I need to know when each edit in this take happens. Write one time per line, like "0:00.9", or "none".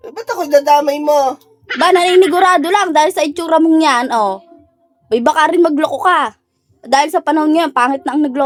none

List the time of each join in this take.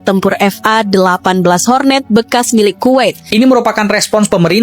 0:03.3

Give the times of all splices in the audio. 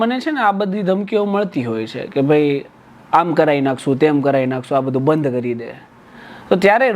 none

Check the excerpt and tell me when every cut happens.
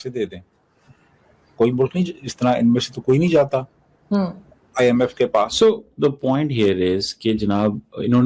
0:06.0

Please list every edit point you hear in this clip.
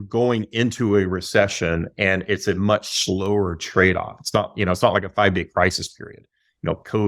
none

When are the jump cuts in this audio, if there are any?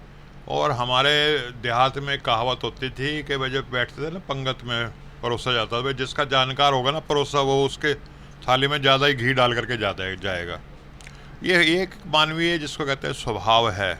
none

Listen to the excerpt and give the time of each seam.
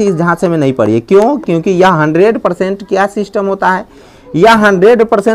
none

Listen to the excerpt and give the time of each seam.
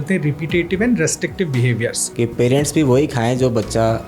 0:02.0

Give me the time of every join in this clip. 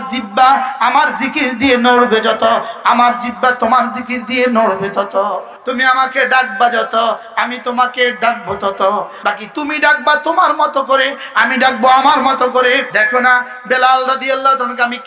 0:05.5
0:09.1
0:12.9

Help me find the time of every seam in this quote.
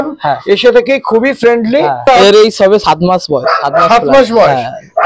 0:02.1

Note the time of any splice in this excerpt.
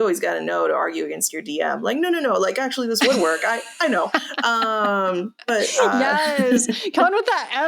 none

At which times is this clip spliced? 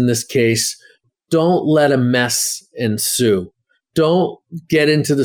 0:01.0

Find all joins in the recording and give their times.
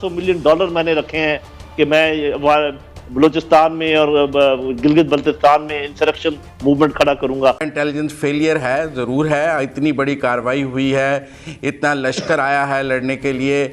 0:07.7

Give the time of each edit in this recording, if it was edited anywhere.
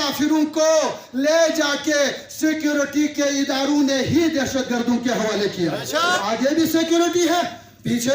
0:06.2

